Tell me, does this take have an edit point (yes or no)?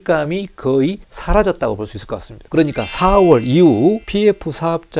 yes